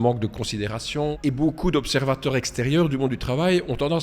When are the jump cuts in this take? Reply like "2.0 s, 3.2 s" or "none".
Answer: 1.2 s

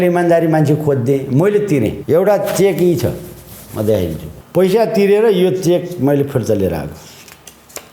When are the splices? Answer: 2.0 s, 4.3 s

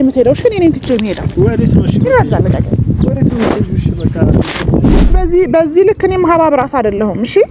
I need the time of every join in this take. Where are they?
5.2 s

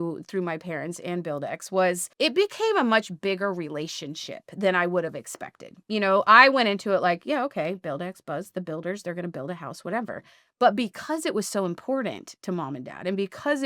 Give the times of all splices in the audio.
2.1 s

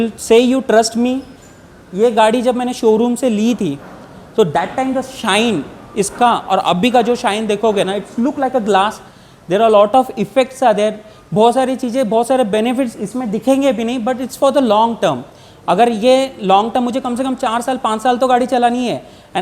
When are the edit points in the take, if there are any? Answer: none

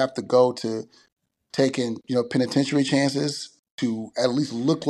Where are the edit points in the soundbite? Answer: 3.6 s

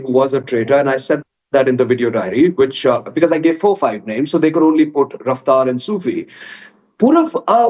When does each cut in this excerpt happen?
none

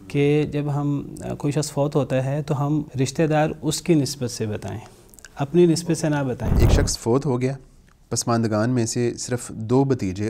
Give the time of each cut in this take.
2.9 s, 6.6 s

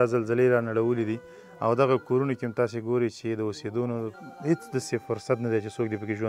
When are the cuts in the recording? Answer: none

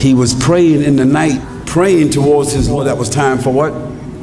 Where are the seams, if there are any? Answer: 1.5 s, 2.8 s

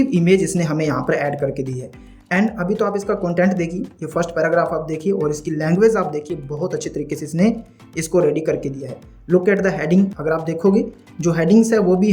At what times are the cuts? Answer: 10.1 s

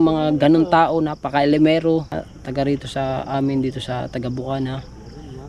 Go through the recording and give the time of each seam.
2.3 s

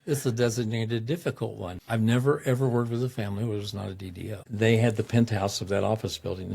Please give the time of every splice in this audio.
1.8 s, 4.5 s

